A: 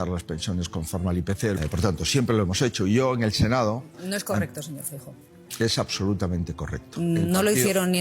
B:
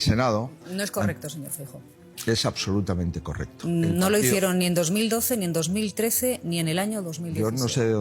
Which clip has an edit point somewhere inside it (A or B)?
A